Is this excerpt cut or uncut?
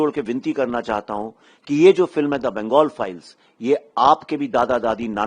uncut